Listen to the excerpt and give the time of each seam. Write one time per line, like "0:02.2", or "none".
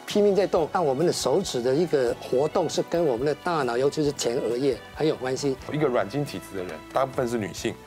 0:00.8
0:05.7